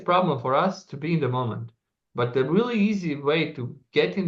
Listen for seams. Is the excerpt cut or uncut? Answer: uncut